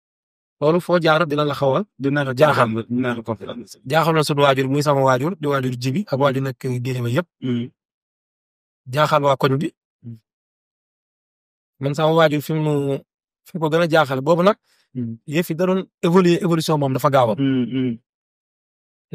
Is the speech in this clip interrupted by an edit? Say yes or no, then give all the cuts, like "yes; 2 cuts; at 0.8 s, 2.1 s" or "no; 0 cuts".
no; 0 cuts